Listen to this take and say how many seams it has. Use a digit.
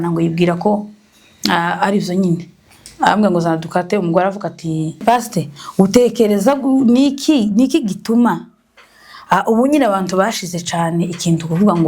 1